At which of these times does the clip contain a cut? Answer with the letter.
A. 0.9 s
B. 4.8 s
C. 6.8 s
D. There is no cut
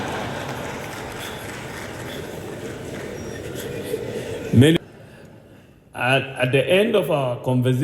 B